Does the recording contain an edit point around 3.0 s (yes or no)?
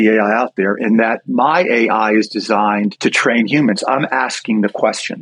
yes